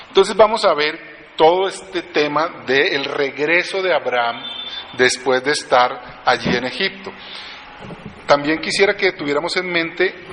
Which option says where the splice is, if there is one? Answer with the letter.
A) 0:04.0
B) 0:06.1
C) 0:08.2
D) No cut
D